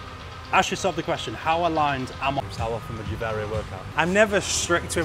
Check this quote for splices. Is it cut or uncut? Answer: cut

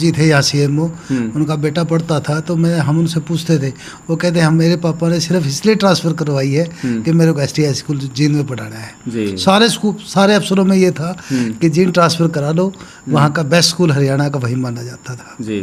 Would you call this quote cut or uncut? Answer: uncut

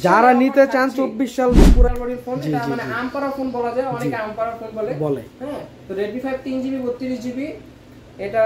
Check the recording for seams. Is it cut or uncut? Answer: cut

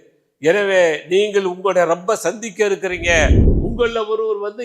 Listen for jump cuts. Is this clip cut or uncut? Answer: cut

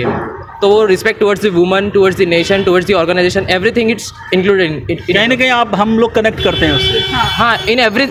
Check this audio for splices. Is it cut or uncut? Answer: uncut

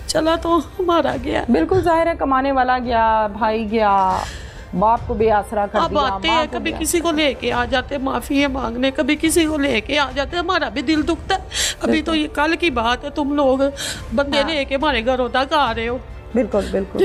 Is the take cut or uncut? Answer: uncut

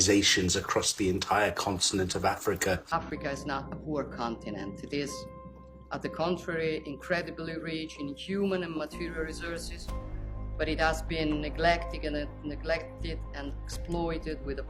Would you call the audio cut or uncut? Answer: cut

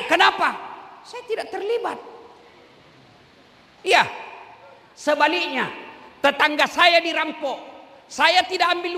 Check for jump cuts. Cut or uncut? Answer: uncut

